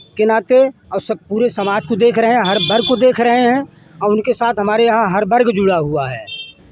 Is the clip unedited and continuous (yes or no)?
yes